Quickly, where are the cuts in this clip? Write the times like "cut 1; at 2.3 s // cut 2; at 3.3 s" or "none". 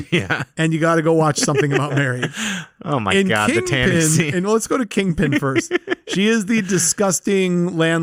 none